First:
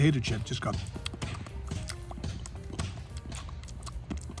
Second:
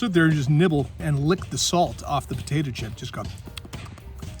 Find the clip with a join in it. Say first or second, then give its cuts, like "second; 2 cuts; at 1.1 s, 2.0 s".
second; 1 cut; at 1.0 s